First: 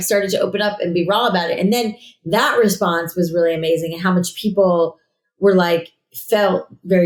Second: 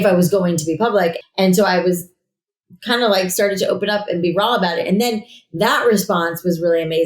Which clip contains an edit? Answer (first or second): second